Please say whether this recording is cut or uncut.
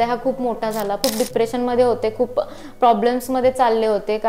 cut